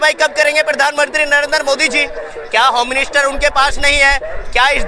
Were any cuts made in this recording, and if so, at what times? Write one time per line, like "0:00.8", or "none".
none